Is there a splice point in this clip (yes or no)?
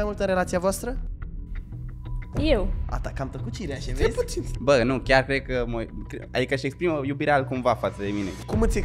no